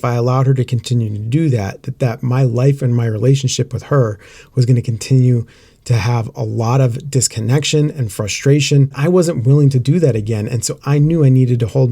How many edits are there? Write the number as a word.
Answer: one